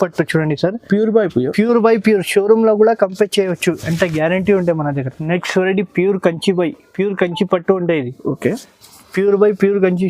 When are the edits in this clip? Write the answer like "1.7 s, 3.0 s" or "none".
5.1 s